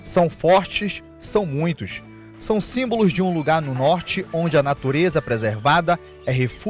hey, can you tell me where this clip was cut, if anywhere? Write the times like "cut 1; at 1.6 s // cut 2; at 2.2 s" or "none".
none